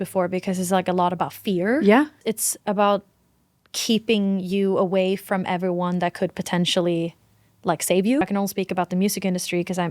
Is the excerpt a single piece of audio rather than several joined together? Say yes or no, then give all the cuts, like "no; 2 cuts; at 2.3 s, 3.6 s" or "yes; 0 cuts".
no; 2 cuts; at 2.2 s, 8.2 s